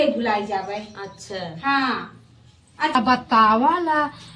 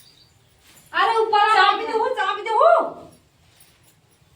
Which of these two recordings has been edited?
first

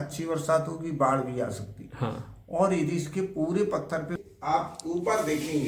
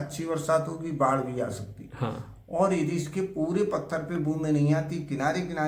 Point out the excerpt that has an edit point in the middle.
first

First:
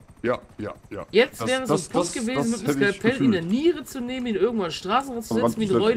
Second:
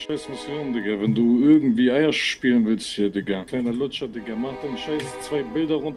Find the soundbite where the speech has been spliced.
second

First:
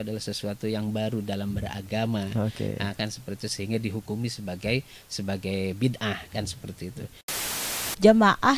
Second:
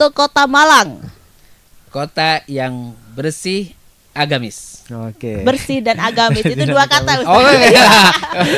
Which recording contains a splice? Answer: first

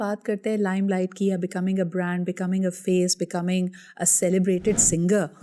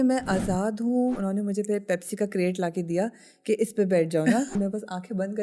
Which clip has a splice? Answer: second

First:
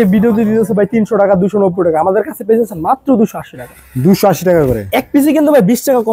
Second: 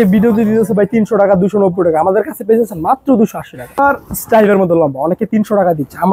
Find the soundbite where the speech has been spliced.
second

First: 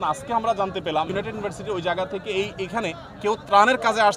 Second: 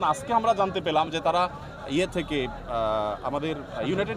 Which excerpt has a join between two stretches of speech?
first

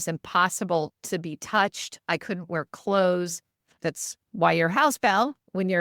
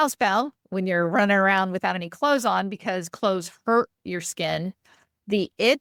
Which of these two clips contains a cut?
first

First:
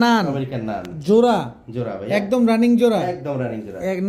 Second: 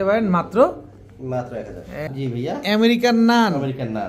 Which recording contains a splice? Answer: second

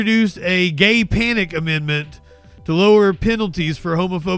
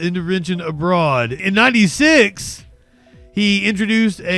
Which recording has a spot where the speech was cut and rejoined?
second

